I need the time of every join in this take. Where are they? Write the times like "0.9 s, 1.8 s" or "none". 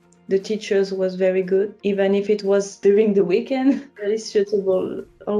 1.8 s, 2.7 s, 3.9 s